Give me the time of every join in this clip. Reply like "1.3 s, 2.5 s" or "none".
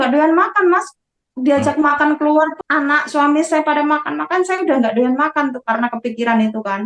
2.6 s